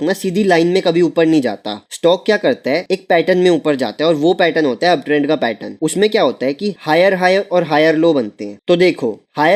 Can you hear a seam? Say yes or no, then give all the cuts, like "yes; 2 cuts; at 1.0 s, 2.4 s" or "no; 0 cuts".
no; 0 cuts